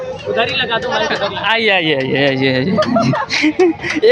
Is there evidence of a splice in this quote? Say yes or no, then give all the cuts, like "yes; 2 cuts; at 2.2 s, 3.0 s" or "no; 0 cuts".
no; 0 cuts